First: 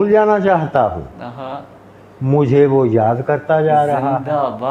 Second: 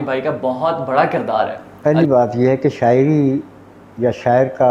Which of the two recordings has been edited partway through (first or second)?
second